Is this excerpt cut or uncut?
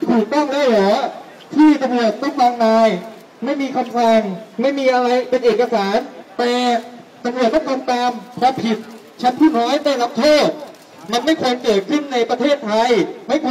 uncut